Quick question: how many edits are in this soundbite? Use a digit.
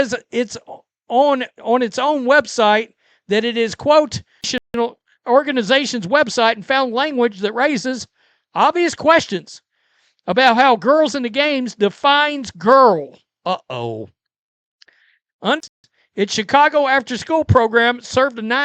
2